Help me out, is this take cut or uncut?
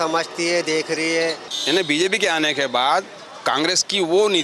cut